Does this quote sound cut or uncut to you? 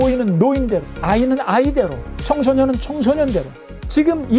uncut